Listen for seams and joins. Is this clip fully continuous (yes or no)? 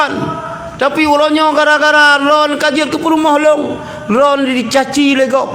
yes